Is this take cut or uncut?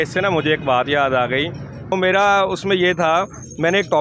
cut